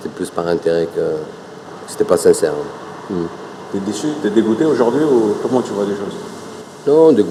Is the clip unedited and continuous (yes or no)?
yes